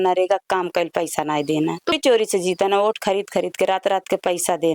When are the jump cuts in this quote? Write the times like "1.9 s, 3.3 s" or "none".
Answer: 2.0 s